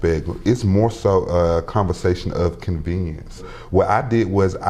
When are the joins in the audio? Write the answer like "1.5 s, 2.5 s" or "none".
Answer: 3.5 s